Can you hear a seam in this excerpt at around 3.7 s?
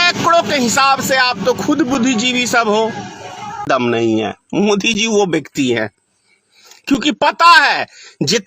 yes; 1 cut; at 3.7 s

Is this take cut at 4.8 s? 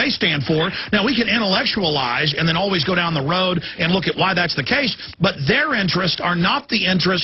no; 1 cut; at 1.8 s

